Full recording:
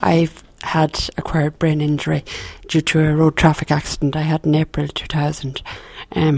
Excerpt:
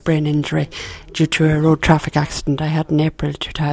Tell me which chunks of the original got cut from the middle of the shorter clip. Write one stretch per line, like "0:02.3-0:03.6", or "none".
none